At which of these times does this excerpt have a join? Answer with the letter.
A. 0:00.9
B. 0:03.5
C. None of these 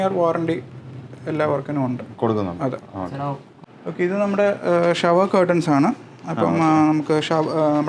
B